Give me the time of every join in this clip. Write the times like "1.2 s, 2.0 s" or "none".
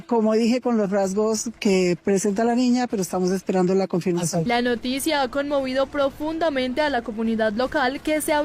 4.4 s